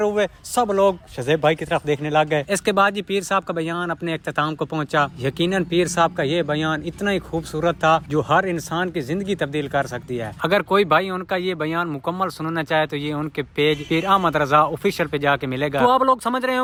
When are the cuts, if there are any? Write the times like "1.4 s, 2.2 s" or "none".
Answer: none